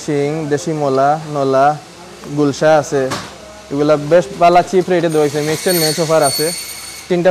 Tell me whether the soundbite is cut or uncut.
uncut